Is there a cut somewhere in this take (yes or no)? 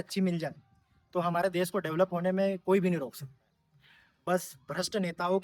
no